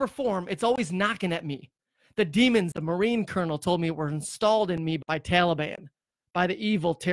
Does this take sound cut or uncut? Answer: cut